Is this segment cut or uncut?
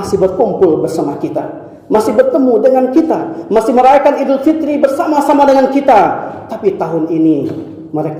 uncut